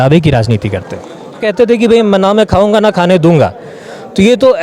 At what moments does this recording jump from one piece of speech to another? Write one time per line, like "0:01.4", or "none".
0:01.5